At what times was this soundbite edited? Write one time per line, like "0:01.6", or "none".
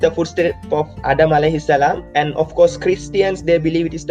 0:00.9
0:02.0